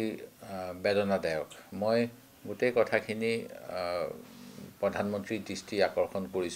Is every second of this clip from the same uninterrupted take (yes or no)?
yes